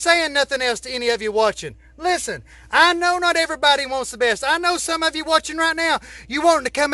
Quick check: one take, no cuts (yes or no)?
yes